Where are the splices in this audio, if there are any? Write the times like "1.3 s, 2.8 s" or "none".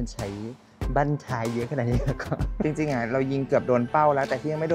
2.6 s

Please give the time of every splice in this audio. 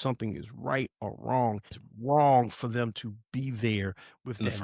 1.8 s

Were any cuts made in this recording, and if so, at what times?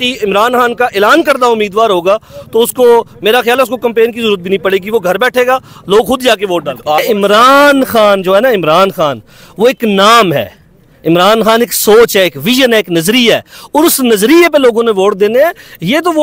7.0 s

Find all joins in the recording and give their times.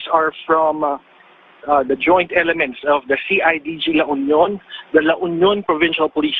4.7 s

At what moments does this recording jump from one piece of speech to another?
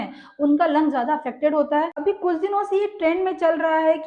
1.9 s

